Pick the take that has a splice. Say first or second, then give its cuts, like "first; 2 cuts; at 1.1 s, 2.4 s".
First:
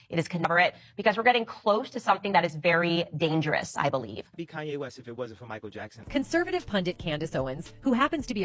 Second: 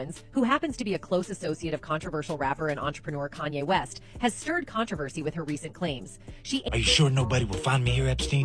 second; 1 cut; at 6.6 s